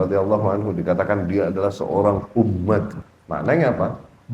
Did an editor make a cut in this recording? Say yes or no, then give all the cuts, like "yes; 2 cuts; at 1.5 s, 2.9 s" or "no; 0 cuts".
yes; 1 cut; at 3.0 s